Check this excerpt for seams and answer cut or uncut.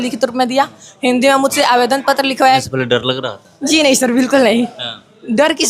cut